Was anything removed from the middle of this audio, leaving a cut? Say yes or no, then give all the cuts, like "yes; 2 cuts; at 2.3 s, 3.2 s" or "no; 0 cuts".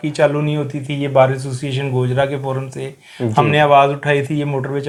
no; 0 cuts